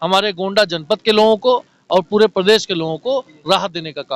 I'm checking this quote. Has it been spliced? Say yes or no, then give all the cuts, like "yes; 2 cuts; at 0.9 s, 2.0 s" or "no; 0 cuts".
no; 0 cuts